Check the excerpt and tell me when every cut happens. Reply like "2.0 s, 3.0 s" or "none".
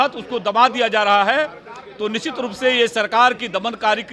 none